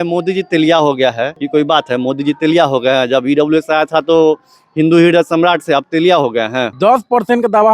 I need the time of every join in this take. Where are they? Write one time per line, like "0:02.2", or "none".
0:01.4
0:06.7